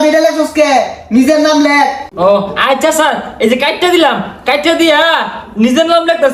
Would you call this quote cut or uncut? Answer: uncut